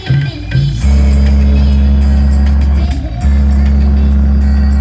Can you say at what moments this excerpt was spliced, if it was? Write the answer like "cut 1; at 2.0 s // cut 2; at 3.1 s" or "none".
none